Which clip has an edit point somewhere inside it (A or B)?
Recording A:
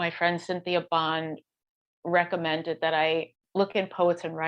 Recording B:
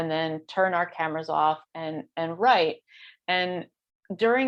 A